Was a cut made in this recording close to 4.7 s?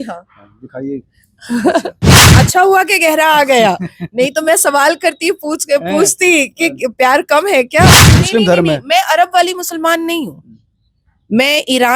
no; 2 cuts; at 2.2 s, 8.1 s

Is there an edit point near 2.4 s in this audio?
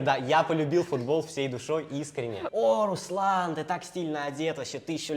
yes; 1 cut; at 2.4 s

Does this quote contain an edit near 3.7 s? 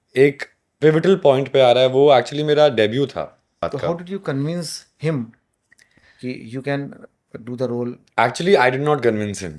yes; 1 cut; at 3.7 s

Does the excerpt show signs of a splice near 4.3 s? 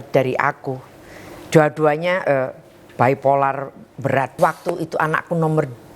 yes; 1 cut; at 4.3 s

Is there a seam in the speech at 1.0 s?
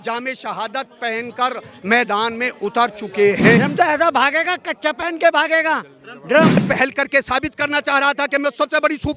no; 2 cuts; at 3.6 s, 6.6 s

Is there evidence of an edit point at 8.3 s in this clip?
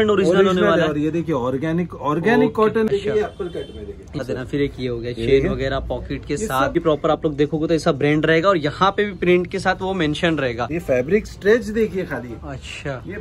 no; 4 cuts; at 2.9 s, 4.2 s, 6.8 s, 10.8 s

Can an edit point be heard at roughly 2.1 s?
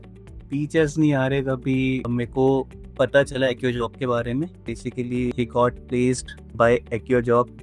yes; 4 cuts; at 2.1 s, 2.8 s, 5.0 s, 6.4 s

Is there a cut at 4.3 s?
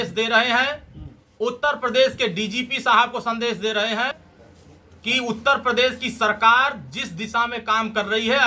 yes; 1 cut; at 4.3 s

